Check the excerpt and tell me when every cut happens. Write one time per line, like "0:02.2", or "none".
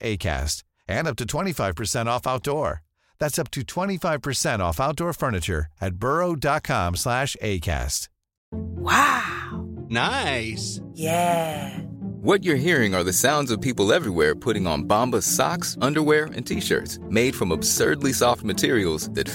none